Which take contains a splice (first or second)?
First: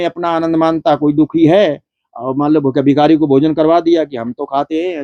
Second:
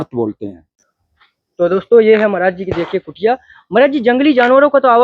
second